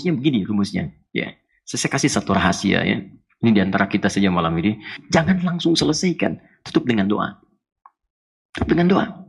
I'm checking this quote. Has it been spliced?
yes; 1 cut; at 5.0 s

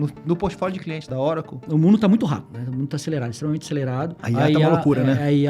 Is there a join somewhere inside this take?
yes; 3 cuts; at 1.4 s, 2.6 s, 4.2 s

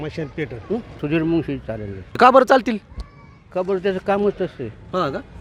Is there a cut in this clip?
yes; 2 cuts; at 1.0 s, 2.1 s

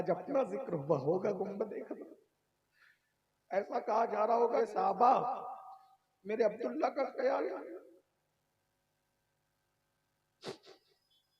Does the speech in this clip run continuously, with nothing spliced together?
no; 1 cut; at 4.6 s

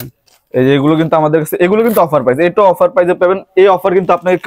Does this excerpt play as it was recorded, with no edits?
yes; 0 cuts

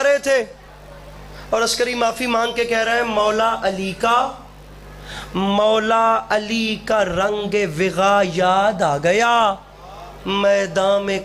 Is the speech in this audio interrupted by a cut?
no; 0 cuts

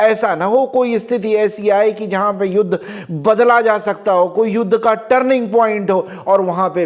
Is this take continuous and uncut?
yes; 0 cuts

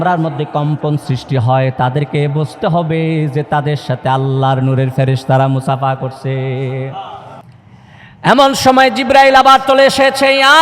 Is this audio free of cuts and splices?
no; 1 cut; at 7.5 s

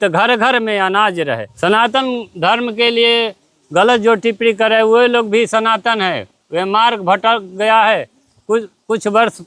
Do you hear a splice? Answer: yes; 1 cut; at 1.5 s

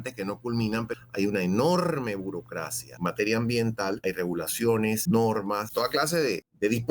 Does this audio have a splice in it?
yes; 5 cuts; at 0.9 s, 2.8 s, 4.0 s, 5.0 s, 6.0 s

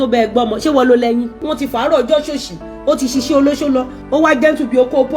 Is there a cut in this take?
yes; 1 cut; at 1.4 s

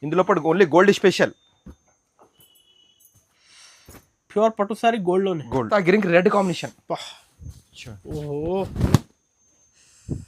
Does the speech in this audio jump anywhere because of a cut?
yes; 1 cut; at 5.7 s

